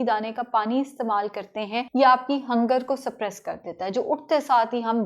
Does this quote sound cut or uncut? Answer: cut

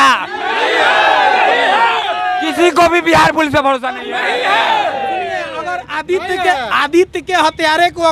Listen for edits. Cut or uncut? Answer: uncut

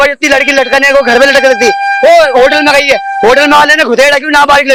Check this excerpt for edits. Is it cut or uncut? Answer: uncut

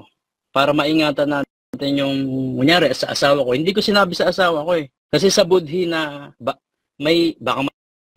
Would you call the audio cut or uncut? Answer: cut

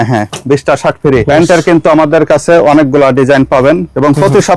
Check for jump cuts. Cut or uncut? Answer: cut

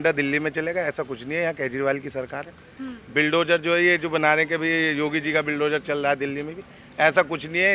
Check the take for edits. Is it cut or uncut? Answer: uncut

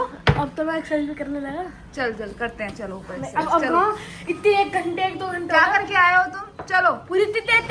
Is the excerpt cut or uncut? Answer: uncut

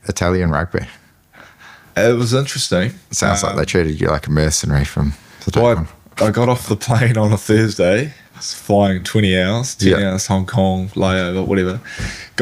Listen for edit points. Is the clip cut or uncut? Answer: uncut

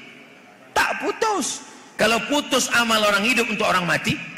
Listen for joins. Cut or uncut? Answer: uncut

